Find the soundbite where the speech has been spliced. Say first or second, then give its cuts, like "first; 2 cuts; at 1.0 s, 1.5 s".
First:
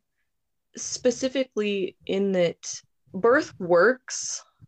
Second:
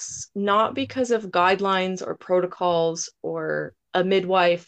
second; 1 cut; at 3.8 s